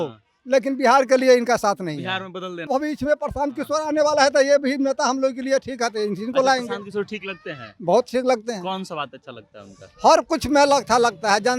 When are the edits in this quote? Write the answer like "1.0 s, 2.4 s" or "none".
2.7 s